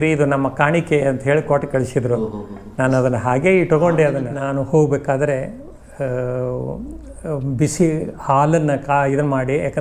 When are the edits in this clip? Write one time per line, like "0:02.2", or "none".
0:04.3